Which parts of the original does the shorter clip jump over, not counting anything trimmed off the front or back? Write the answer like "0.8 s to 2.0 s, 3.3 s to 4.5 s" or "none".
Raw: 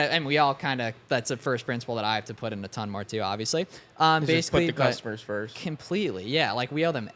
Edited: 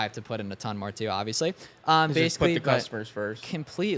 none